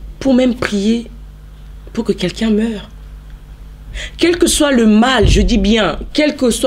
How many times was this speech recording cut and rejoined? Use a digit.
0